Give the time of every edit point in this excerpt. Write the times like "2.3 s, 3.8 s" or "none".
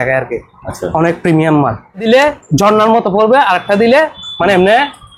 2.0 s